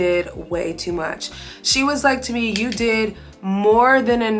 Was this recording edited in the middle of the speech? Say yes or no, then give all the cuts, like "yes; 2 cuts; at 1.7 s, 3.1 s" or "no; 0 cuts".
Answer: no; 0 cuts